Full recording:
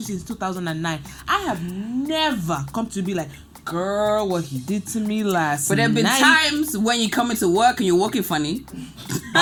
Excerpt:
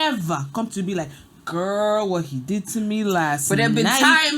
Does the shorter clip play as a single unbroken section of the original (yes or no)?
yes